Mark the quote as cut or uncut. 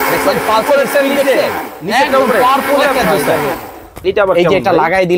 cut